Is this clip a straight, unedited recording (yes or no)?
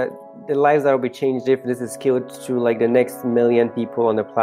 yes